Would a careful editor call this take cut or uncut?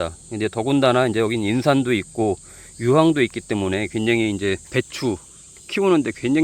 cut